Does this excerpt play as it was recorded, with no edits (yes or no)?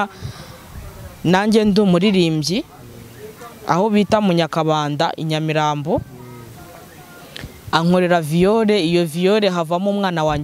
yes